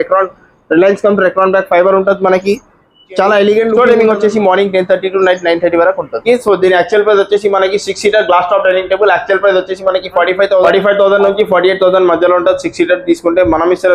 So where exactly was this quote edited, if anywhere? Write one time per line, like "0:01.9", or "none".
0:03.8
0:06.2
0:10.7